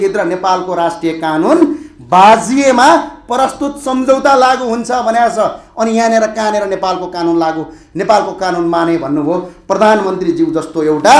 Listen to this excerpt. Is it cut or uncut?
uncut